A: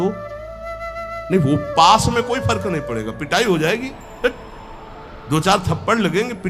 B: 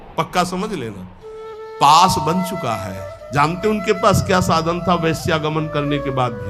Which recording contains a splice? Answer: B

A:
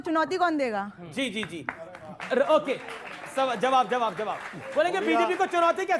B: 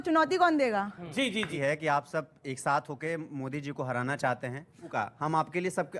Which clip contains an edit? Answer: B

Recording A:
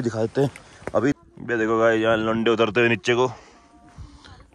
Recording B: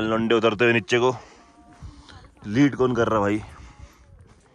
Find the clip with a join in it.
A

